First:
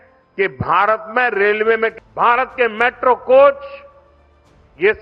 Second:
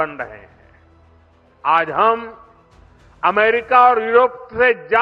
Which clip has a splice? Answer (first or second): first